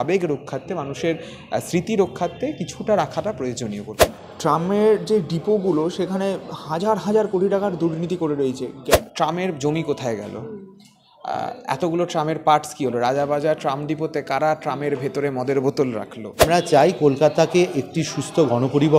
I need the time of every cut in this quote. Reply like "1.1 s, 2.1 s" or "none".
3.9 s, 9.0 s, 16.4 s